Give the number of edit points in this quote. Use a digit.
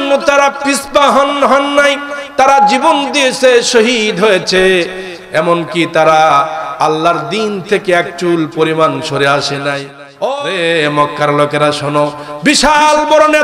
1